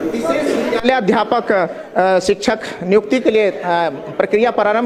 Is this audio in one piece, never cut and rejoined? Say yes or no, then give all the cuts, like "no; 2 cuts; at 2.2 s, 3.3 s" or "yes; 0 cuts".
yes; 0 cuts